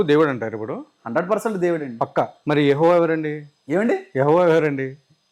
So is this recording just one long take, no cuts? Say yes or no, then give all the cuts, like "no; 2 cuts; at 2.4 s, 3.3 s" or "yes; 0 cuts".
yes; 0 cuts